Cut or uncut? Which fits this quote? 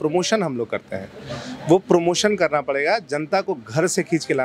uncut